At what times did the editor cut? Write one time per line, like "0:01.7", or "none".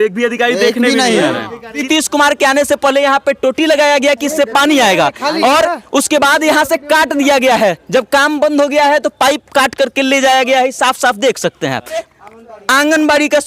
0:01.8
0:12.0